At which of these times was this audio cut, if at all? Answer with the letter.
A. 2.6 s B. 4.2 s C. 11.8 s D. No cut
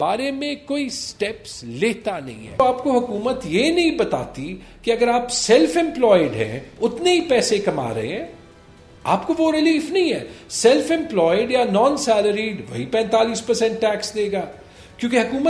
A